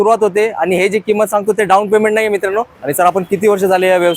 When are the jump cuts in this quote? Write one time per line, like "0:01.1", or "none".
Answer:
0:02.8

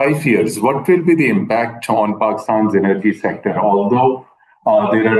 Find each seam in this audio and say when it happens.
none

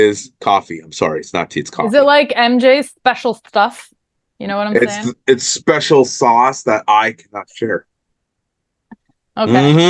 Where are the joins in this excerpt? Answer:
none

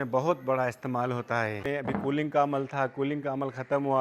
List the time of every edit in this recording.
0:01.7

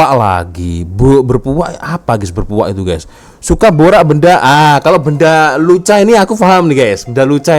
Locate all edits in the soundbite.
none

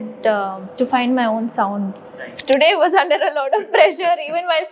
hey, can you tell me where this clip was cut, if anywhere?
0:02.4

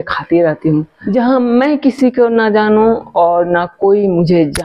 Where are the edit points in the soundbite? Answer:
0:01.0

